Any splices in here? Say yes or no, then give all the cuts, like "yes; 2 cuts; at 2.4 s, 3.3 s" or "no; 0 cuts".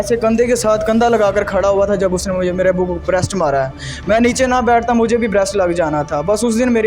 no; 0 cuts